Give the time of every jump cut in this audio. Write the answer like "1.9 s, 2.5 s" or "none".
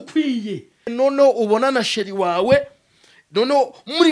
0.9 s